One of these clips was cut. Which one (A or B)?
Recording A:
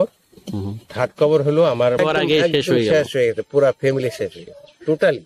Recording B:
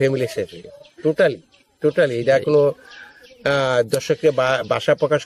A